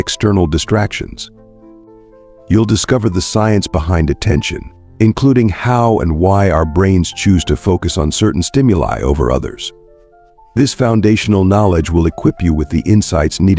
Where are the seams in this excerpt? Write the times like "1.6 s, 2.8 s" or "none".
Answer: 1.2 s, 2.5 s